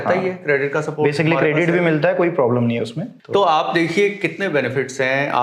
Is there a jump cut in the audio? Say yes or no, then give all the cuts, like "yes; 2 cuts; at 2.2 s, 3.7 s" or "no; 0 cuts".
no; 0 cuts